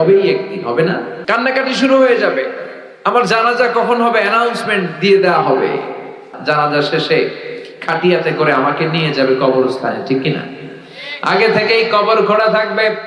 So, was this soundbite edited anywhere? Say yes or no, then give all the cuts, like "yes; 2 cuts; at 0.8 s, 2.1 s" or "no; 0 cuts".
yes; 2 cuts; at 1.1 s, 6.3 s